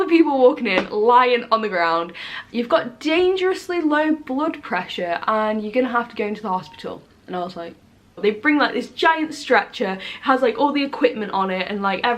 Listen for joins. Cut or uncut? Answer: cut